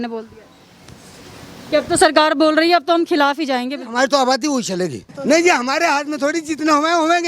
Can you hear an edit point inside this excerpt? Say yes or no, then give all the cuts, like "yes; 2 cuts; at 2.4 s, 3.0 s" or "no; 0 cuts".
yes; 1 cut; at 5.1 s